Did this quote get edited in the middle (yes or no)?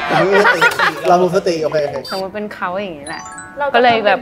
yes